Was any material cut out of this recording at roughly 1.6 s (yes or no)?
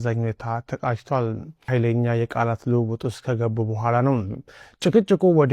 yes